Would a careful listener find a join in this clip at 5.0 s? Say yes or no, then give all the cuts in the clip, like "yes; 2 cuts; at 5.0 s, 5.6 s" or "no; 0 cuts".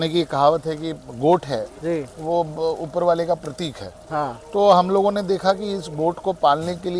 no; 1 cut; at 1.1 s